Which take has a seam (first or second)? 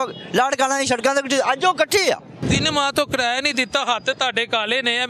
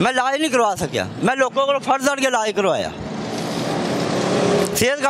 first